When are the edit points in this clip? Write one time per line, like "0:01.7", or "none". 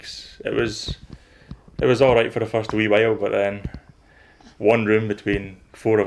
none